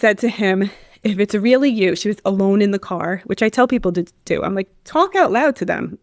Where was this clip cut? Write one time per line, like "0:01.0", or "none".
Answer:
none